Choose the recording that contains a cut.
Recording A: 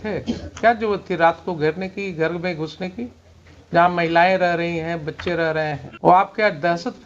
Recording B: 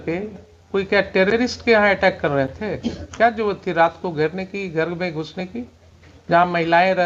A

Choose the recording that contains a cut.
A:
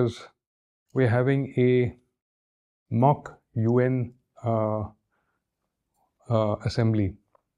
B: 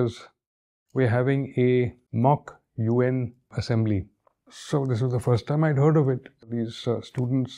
B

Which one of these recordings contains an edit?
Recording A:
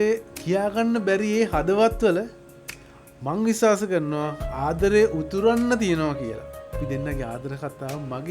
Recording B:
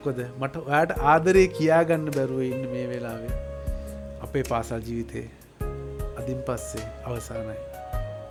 A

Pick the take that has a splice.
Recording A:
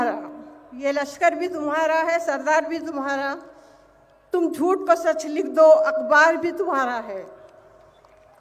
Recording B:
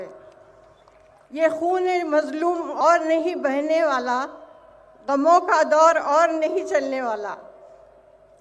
B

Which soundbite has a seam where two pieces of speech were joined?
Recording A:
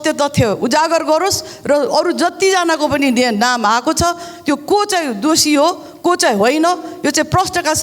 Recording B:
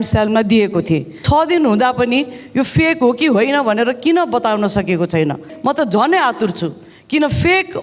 B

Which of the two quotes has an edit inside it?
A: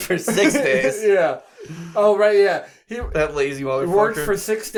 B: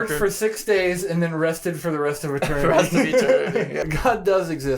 B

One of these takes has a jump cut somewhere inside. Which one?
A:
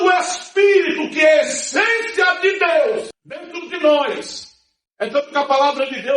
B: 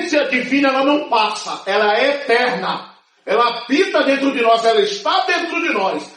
A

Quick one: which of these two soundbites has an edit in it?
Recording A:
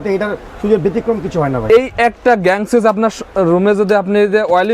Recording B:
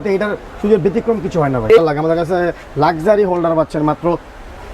B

